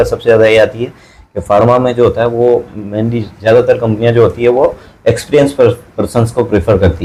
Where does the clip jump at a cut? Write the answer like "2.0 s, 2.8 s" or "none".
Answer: none